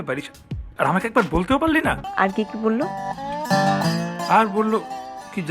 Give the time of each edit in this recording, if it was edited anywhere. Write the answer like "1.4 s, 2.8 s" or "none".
2.1 s